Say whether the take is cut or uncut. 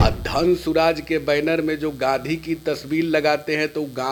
uncut